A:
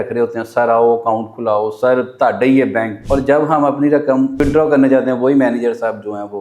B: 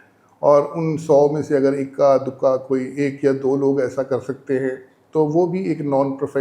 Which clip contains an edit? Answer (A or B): A